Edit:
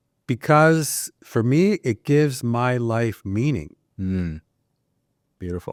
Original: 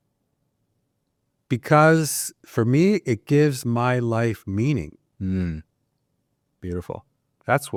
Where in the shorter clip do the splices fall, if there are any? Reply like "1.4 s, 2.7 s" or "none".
none